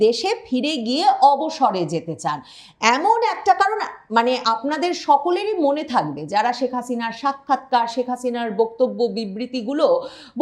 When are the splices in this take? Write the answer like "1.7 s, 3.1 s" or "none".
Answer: none